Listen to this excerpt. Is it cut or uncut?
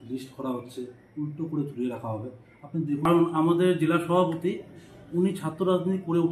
cut